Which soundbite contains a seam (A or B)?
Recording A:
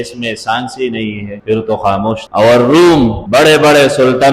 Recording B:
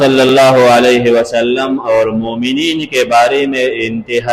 A